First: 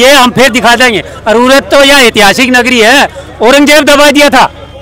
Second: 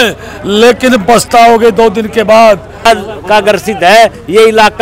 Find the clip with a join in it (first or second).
second